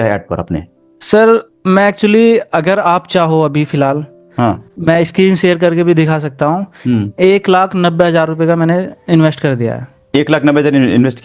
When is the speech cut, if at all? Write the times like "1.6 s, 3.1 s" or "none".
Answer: none